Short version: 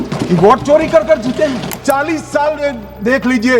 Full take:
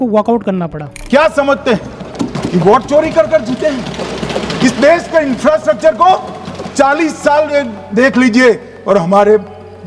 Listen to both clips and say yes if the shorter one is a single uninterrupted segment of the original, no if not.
no